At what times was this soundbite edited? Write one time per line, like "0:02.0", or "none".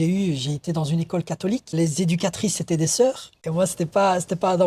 0:03.3